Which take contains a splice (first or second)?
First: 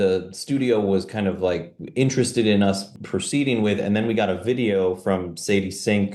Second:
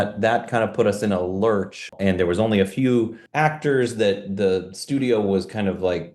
second